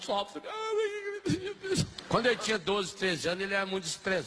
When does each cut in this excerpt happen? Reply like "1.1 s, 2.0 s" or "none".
2.0 s